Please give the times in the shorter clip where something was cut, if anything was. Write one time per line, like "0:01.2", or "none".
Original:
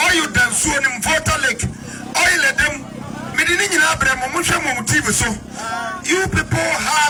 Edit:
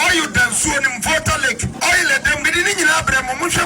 0:01.7
0:02.4